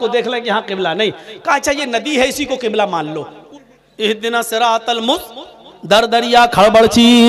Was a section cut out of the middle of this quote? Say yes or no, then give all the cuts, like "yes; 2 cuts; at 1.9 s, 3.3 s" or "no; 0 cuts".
yes; 1 cut; at 3.3 s